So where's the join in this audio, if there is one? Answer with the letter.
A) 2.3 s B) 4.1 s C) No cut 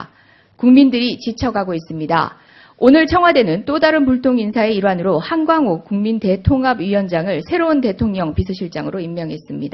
B